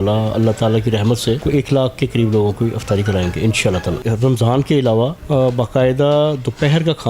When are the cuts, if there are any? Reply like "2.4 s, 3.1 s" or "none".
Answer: 1.4 s, 4.0 s, 5.2 s